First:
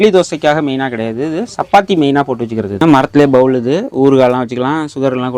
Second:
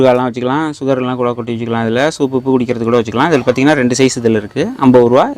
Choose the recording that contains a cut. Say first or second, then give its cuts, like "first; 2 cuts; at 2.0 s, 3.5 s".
first; 1 cut; at 2.7 s